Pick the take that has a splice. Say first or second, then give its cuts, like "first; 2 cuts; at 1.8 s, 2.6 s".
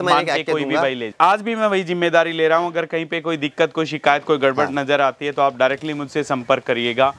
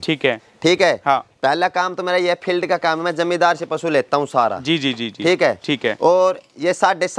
first; 1 cut; at 1.1 s